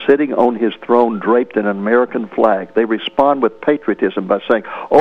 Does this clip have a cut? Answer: no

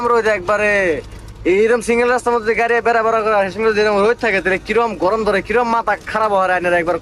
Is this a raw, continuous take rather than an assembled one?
yes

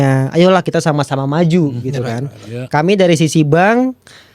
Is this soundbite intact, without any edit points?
yes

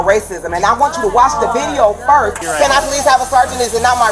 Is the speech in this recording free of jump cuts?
no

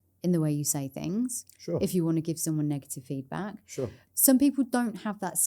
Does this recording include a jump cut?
yes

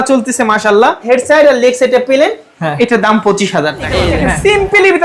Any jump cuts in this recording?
yes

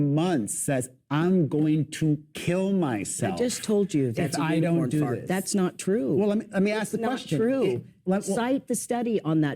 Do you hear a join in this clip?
yes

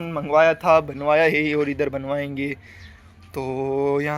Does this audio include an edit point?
no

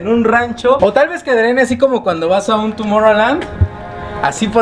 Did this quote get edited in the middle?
no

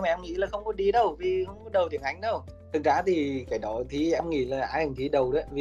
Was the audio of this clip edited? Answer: yes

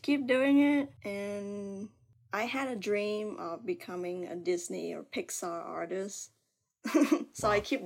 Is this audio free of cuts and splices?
yes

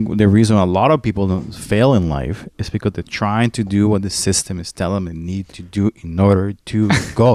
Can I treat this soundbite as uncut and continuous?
yes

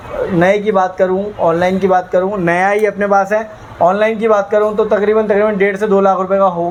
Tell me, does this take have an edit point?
no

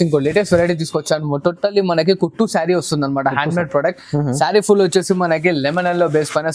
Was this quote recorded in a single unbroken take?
yes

